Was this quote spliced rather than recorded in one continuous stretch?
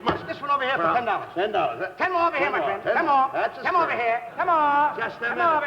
yes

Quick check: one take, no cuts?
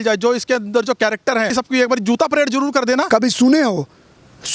no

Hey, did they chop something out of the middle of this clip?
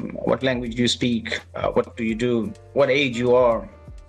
yes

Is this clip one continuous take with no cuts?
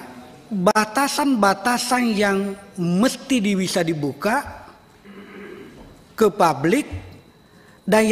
yes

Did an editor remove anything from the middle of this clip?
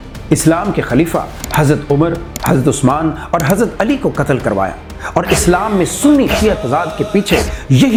no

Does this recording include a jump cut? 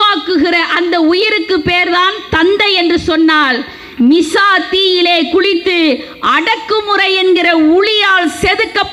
no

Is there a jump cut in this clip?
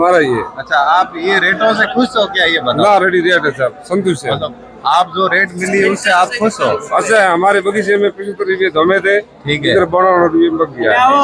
no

